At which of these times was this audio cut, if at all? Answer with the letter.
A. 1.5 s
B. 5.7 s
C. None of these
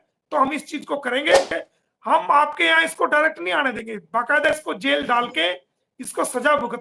A